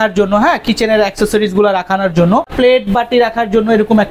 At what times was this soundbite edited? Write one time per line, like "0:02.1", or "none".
0:02.5